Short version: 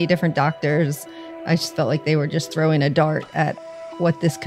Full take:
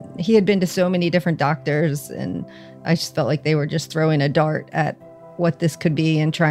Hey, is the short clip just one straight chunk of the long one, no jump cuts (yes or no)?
no